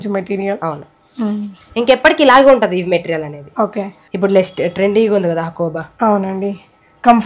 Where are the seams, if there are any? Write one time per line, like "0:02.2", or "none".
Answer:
0:04.0